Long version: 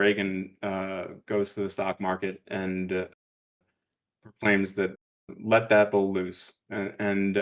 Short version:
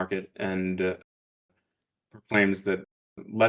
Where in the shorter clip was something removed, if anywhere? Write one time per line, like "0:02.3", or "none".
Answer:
none